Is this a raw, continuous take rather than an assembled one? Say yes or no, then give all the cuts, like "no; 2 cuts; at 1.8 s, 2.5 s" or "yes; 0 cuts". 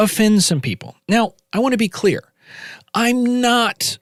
yes; 0 cuts